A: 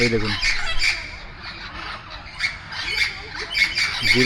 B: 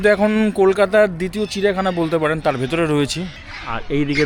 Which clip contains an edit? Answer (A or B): B